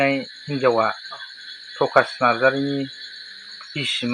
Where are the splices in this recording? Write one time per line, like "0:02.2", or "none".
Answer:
none